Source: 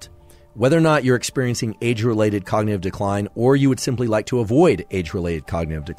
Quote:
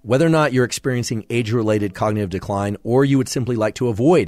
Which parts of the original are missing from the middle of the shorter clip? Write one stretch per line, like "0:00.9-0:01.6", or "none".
none